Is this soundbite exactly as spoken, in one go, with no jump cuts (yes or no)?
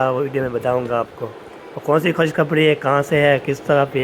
yes